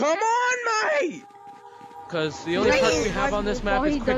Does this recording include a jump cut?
no; 0 cuts

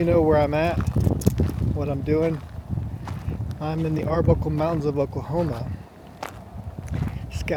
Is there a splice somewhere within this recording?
no; 0 cuts

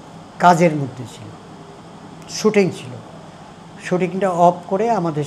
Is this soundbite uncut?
yes; 0 cuts

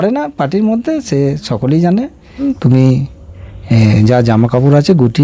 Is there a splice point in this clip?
yes; 1 cut; at 2.4 s

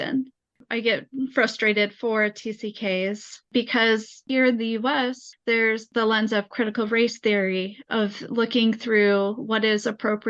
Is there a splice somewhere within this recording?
no; 0 cuts

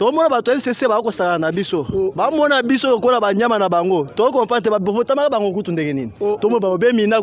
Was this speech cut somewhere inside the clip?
no; 0 cuts

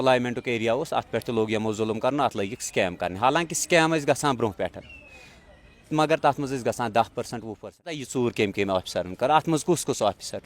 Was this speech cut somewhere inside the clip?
yes; 1 cut; at 8.0 s

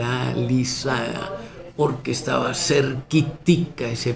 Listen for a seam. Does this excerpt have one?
no; 0 cuts

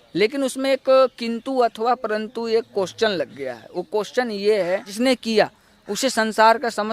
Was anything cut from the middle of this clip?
yes; 1 cut; at 4.9 s

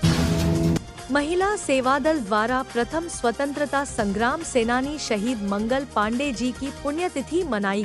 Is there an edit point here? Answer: yes; 1 cut; at 0.9 s

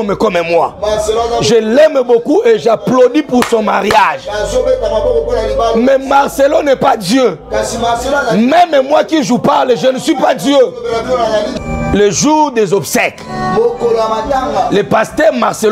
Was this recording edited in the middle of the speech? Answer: yes; 1 cut; at 11.6 s

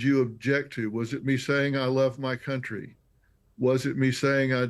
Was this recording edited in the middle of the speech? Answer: yes; 1 cut; at 2.8 s

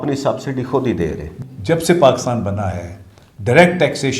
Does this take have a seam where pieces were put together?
yes; 1 cut; at 1.3 s

